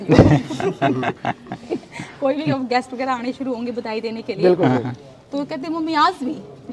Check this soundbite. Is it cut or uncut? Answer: uncut